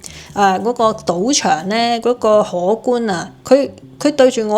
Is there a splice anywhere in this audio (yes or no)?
no